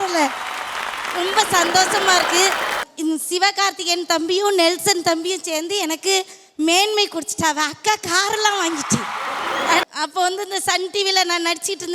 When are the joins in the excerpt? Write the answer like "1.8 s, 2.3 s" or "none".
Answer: 2.8 s, 9.8 s